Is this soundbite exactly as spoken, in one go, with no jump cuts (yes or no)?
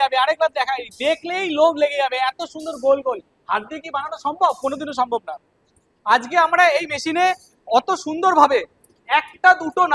yes